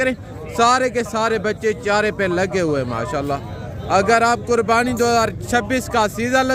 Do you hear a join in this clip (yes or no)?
no